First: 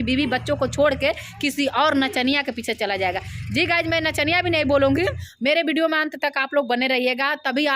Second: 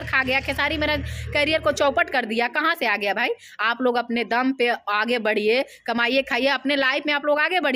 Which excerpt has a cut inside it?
first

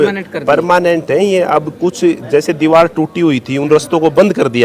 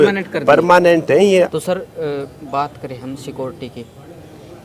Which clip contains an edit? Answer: second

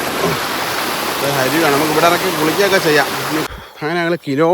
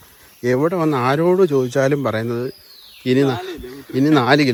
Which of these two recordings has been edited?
first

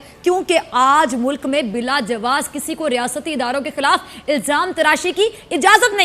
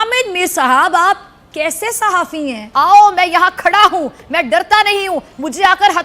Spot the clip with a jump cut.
second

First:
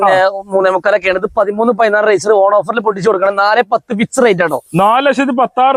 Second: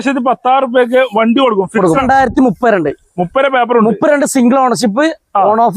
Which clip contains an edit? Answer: second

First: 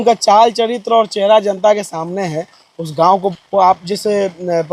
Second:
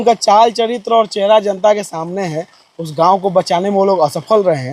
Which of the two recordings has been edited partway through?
first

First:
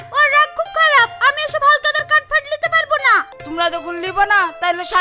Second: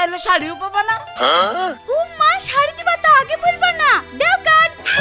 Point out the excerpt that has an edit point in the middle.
first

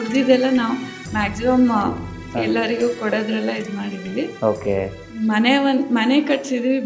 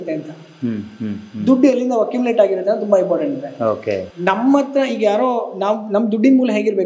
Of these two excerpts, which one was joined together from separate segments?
second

